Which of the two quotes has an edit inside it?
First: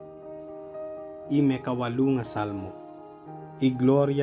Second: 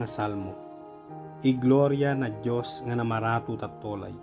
first; 1 cut; at 1.3 s

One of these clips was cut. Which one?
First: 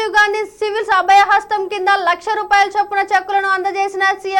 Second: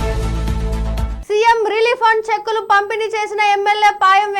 second; 1 cut; at 1.1 s

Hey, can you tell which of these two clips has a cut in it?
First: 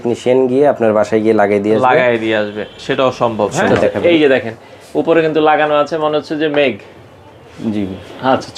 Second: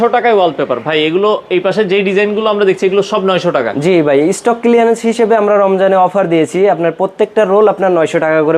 first; 1 cut; at 4.0 s

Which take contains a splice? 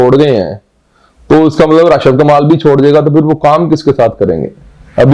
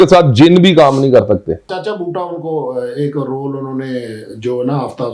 second; 1 cut; at 1.7 s

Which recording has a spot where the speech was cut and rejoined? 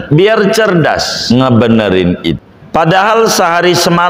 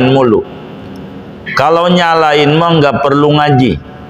first; 2 cuts; at 1.1 s, 2.4 s

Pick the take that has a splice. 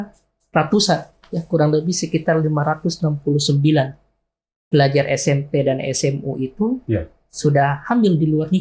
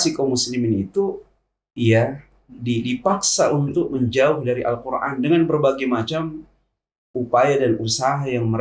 second; 1 cut; at 7.1 s

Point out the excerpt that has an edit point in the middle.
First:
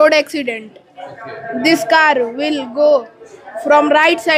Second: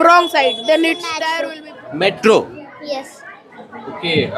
second; 1 cut; at 1.2 s

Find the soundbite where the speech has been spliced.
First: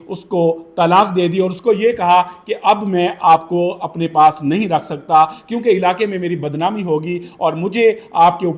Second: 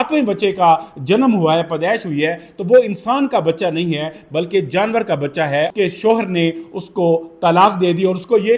second; 1 cut; at 5.7 s

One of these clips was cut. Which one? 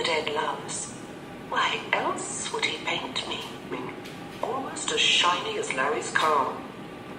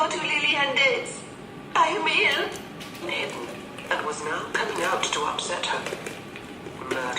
second; 1 cut; at 3.7 s

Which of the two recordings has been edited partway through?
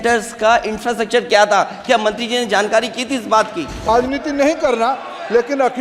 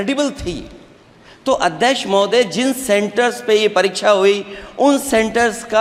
first; 1 cut; at 3.9 s

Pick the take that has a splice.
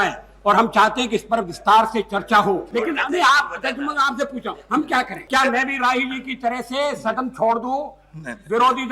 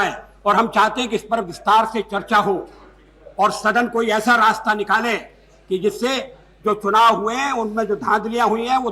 first; 2 cuts; at 2.7 s, 5.2 s

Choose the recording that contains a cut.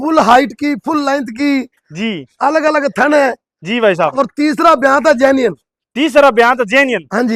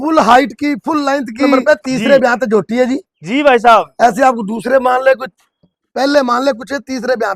second; 1 cut; at 1.5 s

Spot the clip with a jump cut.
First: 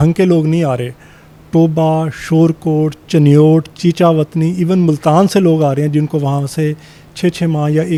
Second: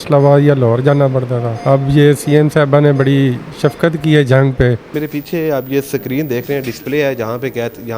second; 2 cuts; at 1.5 s, 4.9 s

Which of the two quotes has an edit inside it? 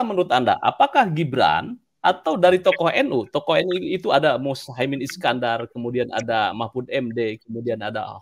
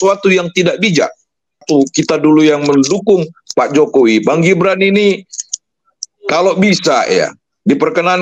second; 1 cut; at 1.6 s

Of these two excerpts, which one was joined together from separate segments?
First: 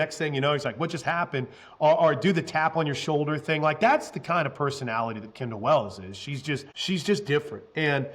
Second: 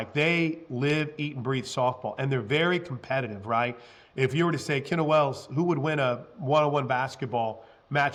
first; 1 cut; at 6.7 s

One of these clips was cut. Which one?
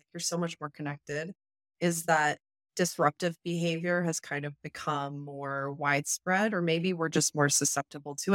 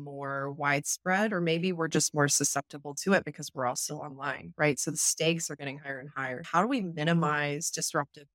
second; 1 cut; at 6.4 s

